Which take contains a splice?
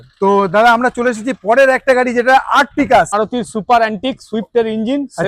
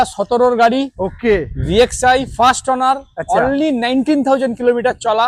first; 1 cut; at 3.1 s

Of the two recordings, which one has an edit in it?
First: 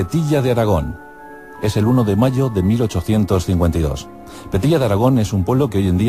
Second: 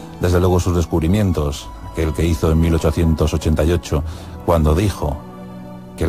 first; 1 cut; at 3.6 s

